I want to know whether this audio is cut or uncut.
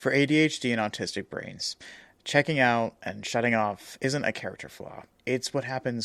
uncut